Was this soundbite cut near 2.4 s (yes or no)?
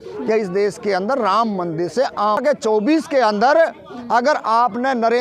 yes